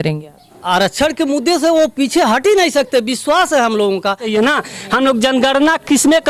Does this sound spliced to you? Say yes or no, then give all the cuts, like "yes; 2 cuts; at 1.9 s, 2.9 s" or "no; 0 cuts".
yes; 1 cut; at 4.3 s